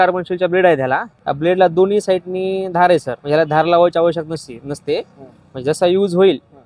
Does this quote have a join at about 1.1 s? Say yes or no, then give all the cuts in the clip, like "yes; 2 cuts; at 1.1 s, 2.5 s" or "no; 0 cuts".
yes; 2 cuts; at 1.1 s, 3.1 s